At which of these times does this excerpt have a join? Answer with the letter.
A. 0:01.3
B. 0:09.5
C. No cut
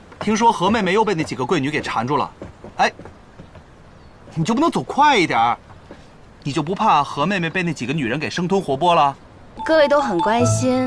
B